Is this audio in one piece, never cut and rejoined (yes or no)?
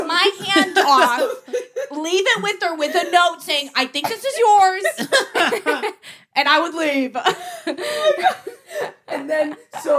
yes